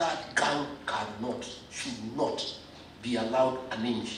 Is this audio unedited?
yes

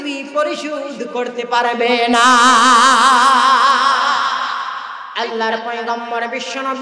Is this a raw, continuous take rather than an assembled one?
no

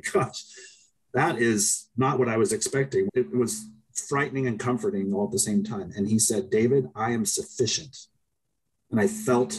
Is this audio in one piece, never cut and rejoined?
no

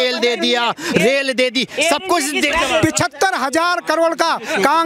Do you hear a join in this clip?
yes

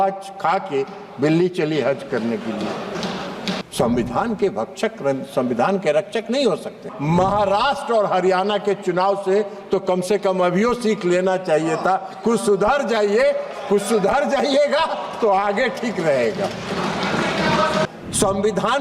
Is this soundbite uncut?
no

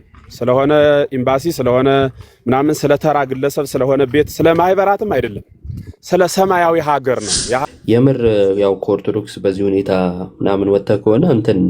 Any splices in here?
yes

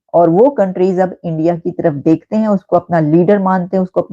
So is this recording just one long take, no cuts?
yes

